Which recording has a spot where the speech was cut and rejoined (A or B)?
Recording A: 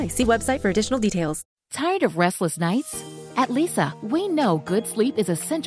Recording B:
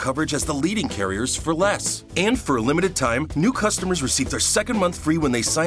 A